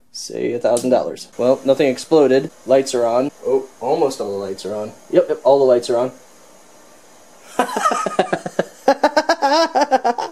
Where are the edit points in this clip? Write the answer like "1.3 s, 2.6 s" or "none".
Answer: 1.2 s, 2.5 s, 3.4 s